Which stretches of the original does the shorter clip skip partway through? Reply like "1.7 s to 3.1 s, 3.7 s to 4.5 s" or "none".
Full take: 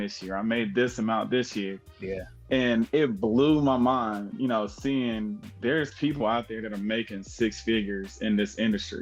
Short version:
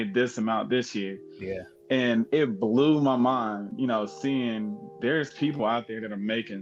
none